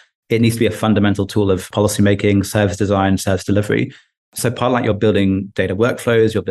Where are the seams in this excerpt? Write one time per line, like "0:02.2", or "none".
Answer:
0:01.7